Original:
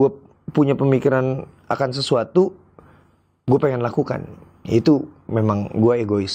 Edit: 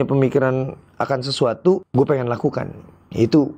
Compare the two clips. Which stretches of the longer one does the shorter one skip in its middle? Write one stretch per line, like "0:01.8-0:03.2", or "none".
0:02.6-0:03.4